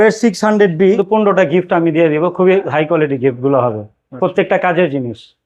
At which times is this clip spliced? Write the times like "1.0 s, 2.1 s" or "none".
1.0 s